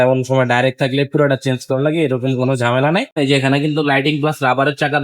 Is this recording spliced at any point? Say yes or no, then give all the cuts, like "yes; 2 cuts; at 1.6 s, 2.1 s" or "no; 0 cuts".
yes; 1 cut; at 3.1 s